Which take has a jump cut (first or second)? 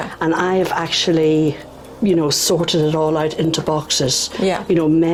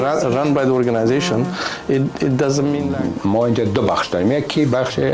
second